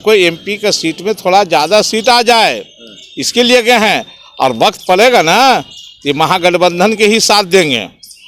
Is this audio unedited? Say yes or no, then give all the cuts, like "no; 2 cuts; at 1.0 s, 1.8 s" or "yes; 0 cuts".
yes; 0 cuts